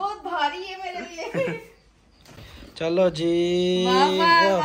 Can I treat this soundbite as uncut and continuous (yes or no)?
yes